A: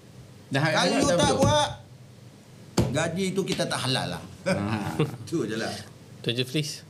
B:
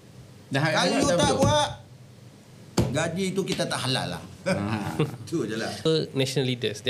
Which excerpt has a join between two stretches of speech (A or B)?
B